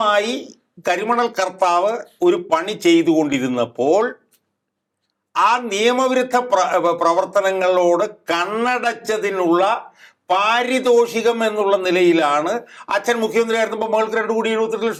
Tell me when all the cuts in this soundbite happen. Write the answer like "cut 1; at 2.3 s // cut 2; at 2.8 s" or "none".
none